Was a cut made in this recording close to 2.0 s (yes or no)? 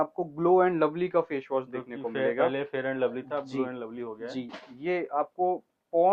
no